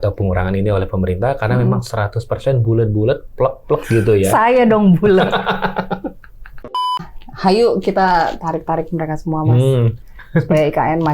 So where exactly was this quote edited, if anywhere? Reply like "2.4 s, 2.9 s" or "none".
7.0 s